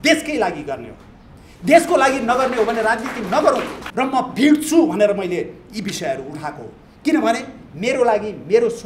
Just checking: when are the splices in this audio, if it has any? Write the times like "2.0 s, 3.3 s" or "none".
3.8 s

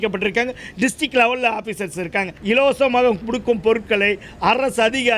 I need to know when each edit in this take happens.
2.3 s

